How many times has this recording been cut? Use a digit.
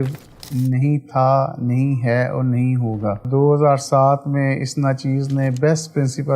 1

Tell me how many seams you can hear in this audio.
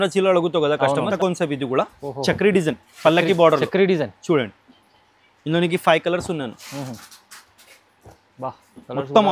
1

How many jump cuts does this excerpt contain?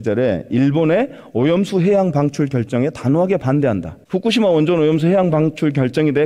1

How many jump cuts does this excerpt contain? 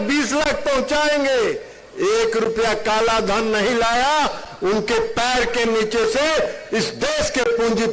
0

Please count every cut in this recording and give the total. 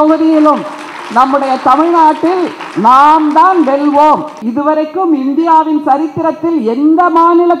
1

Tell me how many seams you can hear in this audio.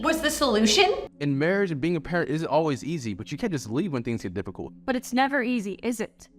1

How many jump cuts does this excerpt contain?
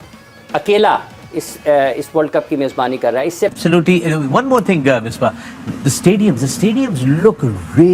1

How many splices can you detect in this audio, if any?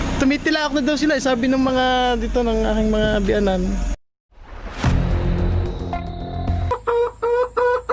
1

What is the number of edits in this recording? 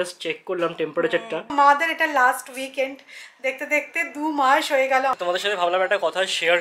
2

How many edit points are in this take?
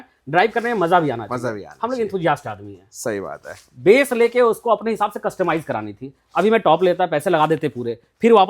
0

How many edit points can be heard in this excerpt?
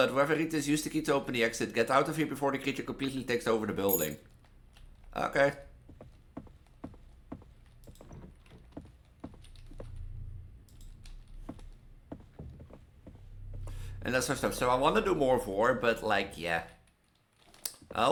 0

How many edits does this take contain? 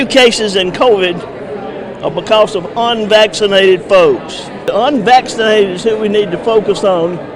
1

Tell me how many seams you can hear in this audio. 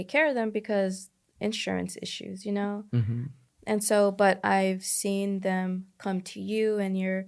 0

